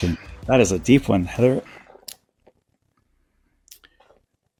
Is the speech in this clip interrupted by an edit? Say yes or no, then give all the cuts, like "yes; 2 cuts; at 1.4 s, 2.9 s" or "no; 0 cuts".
no; 0 cuts